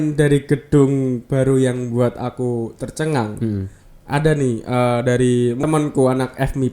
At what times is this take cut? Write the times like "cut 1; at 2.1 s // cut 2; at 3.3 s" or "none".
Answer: cut 1; at 5.6 s